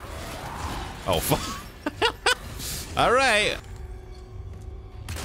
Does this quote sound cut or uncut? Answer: cut